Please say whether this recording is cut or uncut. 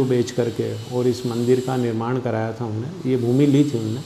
uncut